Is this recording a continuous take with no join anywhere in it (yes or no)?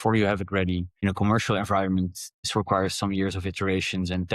no